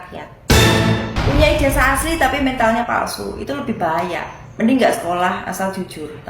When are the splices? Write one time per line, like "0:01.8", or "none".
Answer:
0:01.1